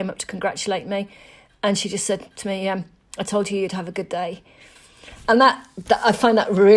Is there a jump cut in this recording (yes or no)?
no